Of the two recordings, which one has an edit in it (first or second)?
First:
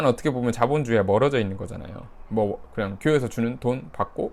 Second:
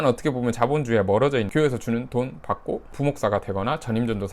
second